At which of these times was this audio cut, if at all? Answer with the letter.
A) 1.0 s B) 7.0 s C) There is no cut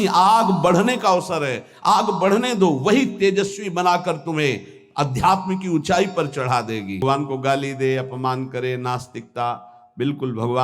B